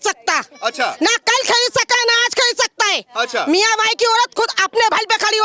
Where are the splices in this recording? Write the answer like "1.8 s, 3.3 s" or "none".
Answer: none